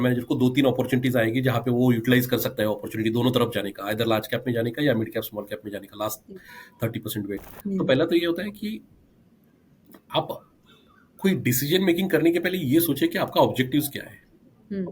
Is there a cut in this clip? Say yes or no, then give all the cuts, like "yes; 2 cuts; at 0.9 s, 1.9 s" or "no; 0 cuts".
yes; 1 cut; at 7.5 s